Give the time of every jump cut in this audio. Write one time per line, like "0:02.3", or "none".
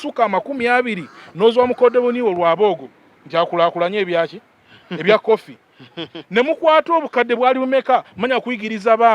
none